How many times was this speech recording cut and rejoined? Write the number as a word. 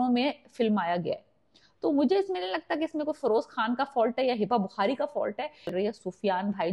one